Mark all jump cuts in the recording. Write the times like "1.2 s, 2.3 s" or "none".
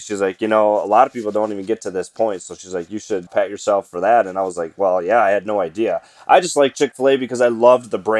none